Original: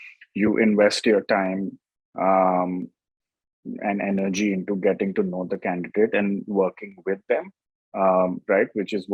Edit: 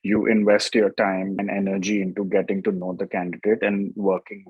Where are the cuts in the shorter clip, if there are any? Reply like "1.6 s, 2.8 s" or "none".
1.4 s